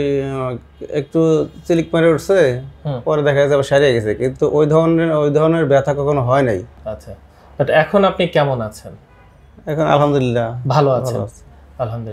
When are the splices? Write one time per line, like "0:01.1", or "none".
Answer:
0:06.8

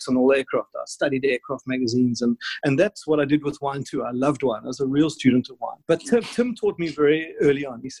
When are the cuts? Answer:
none

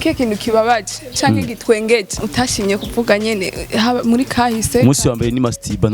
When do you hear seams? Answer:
0:02.2

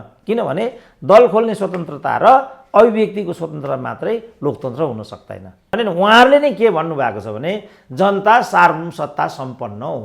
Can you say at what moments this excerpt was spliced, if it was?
0:05.7

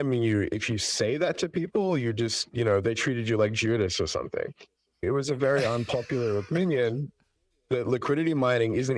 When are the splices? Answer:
0:05.0

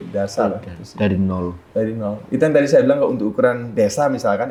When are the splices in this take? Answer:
none

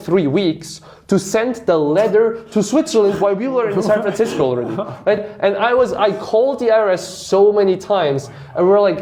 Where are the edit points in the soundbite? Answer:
none

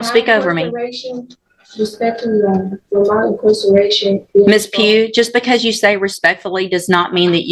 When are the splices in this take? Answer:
none

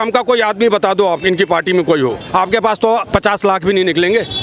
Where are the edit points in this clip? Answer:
none

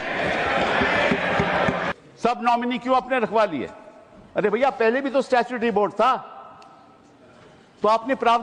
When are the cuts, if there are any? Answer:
0:01.9

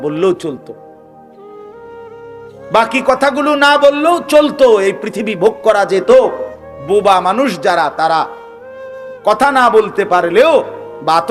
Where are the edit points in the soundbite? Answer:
none

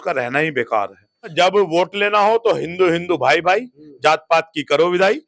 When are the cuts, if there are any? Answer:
0:01.3

